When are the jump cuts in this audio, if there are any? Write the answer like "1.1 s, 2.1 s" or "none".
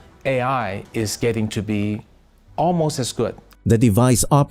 none